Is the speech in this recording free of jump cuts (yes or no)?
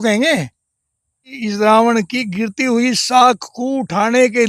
no